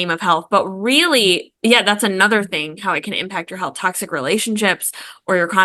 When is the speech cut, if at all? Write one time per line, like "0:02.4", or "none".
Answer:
none